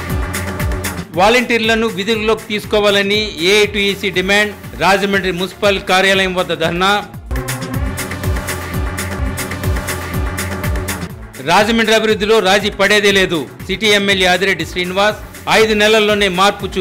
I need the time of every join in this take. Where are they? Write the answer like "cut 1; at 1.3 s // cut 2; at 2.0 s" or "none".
none